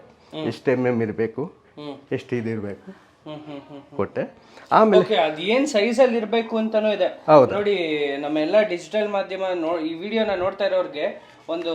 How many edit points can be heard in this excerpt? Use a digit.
0